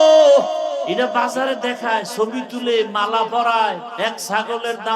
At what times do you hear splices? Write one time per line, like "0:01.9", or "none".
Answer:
0:00.9
0:03.9

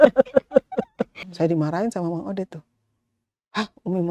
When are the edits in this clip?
0:01.1

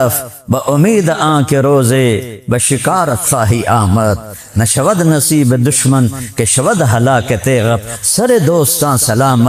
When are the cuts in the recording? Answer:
none

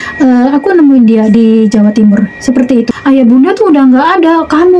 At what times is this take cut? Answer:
0:02.9

